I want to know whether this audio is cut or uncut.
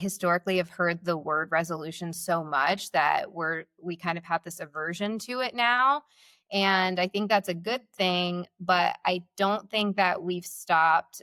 uncut